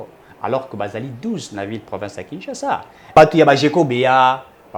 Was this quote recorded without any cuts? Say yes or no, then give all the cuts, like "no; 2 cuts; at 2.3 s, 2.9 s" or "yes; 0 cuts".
no; 1 cut; at 3.1 s